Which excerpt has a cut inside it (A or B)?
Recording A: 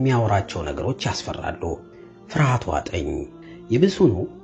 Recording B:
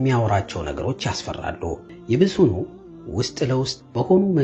B